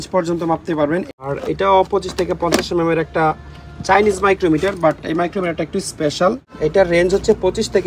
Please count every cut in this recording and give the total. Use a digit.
2